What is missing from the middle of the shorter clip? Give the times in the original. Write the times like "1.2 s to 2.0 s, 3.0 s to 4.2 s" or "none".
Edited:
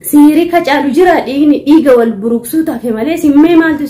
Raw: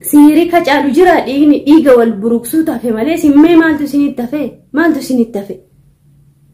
none